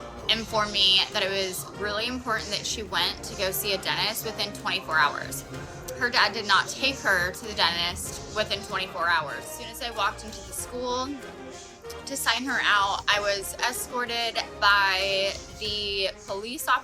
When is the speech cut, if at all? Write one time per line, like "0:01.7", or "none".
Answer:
0:09.6